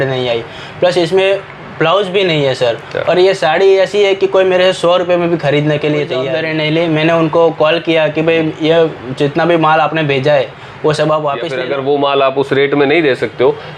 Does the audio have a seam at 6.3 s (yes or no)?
yes